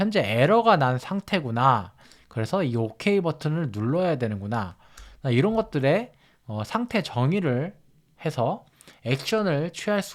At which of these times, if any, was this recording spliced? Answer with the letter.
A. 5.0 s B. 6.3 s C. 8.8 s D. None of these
D